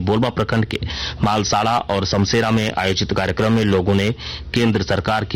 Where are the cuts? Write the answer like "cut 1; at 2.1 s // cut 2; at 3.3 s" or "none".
none